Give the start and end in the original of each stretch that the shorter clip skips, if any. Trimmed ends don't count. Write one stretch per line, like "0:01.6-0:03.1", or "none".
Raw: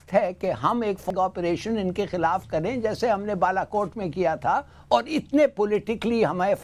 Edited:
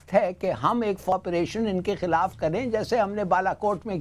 0:01.1-0:01.2